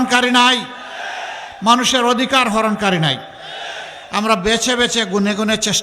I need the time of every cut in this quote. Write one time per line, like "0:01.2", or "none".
none

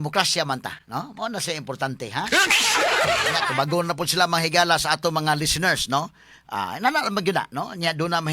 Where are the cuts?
0:03.3

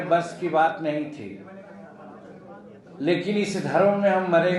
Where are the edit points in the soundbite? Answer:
none

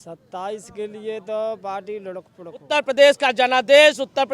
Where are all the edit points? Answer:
0:02.7

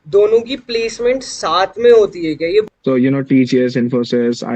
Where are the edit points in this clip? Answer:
0:02.7

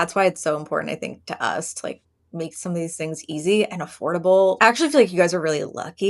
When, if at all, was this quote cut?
0:04.6

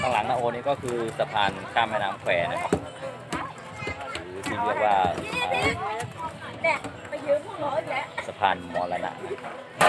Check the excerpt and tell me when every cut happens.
none

